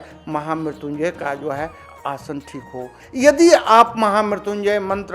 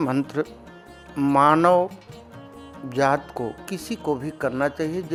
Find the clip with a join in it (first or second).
first